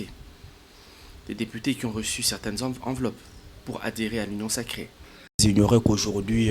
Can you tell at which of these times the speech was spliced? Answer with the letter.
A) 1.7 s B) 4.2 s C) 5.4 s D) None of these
C